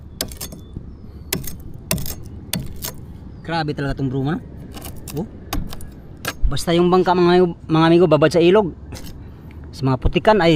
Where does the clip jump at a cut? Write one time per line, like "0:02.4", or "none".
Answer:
none